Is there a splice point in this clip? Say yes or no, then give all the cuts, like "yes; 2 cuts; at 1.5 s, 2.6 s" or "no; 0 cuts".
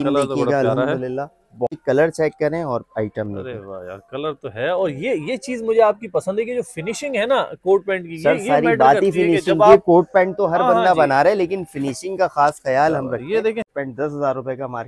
yes; 2 cuts; at 1.7 s, 13.7 s